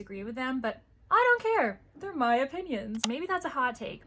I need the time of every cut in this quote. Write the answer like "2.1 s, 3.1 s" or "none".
3.0 s